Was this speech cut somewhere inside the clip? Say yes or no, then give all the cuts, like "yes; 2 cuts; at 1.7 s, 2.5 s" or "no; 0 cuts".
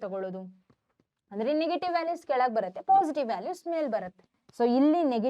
yes; 1 cut; at 4.4 s